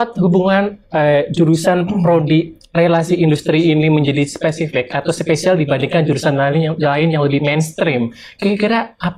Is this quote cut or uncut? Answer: uncut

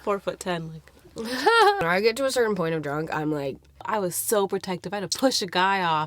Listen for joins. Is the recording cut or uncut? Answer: cut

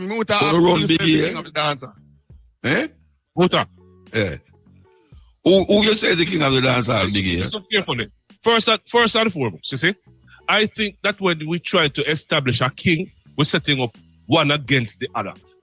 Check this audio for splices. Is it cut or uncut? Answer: uncut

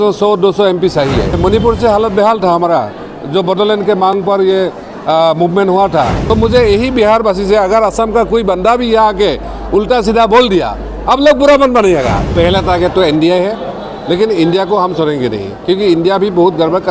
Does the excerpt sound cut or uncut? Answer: cut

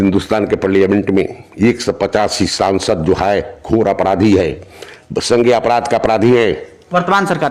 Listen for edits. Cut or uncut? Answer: uncut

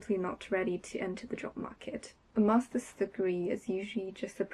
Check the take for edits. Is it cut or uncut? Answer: cut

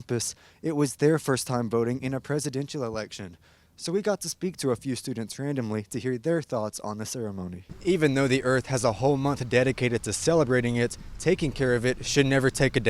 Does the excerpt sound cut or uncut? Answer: cut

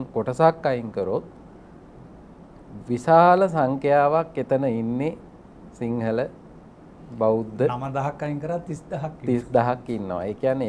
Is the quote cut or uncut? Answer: uncut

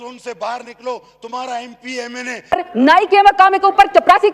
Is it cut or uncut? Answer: cut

